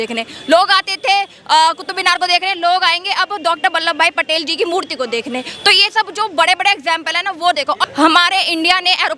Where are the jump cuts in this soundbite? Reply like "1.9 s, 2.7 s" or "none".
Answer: 7.8 s